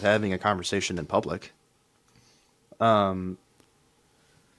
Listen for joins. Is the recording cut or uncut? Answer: uncut